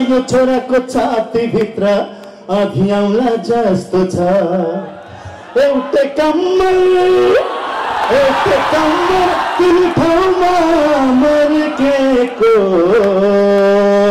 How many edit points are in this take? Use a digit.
0